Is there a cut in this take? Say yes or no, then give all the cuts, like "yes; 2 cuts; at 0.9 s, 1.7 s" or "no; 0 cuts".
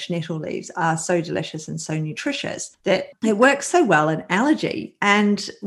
yes; 1 cut; at 3.0 s